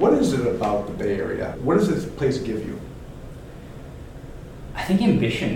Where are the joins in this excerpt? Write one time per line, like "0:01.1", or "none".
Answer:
0:01.5